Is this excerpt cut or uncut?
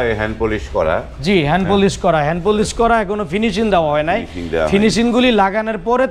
uncut